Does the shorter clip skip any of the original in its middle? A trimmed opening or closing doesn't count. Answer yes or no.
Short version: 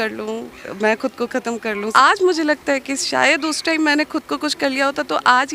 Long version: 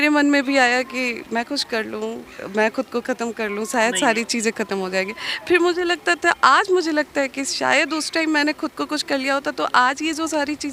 yes